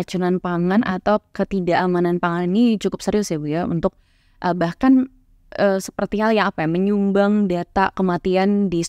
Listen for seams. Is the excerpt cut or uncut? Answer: uncut